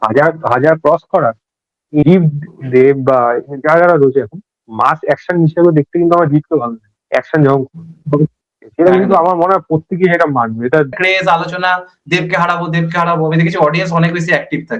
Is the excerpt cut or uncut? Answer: cut